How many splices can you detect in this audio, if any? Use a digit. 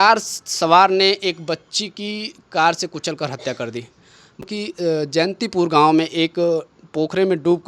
1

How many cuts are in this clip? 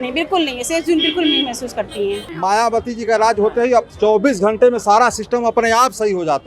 1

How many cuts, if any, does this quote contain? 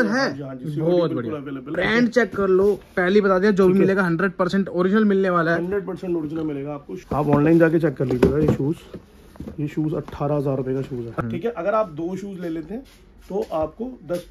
3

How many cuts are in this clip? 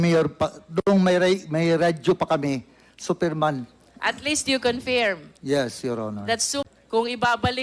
1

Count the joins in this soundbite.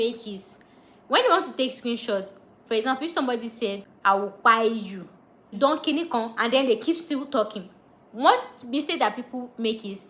2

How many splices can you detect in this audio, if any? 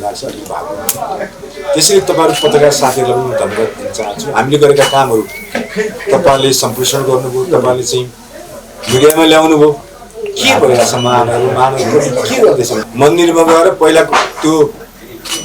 1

